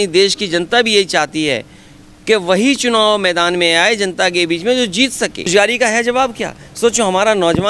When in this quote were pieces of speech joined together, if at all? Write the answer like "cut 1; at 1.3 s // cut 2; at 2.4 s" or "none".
cut 1; at 5.5 s